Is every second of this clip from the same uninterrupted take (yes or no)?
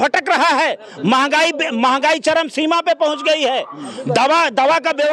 yes